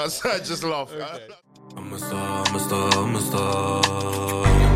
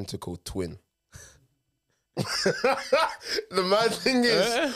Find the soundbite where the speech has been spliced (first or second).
first